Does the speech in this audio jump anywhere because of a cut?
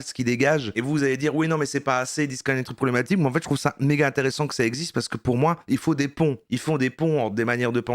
no; 0 cuts

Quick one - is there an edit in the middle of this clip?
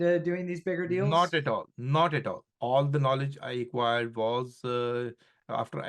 yes; 1 cut; at 2.5 s

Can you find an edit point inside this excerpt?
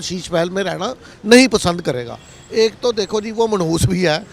no; 0 cuts

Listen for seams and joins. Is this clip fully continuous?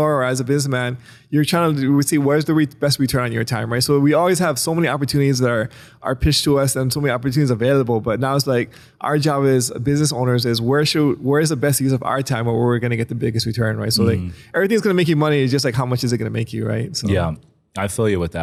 yes; 0 cuts

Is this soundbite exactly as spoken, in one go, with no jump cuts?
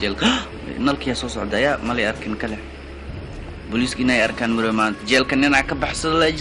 no; 1 cut; at 4.7 s

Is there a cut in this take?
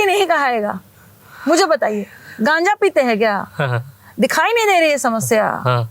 no; 0 cuts

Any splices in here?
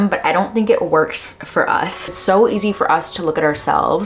yes; 1 cut; at 2.1 s

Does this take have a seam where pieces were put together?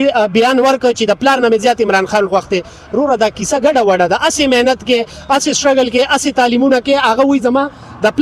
no; 0 cuts

